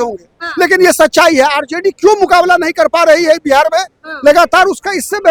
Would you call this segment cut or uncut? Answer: uncut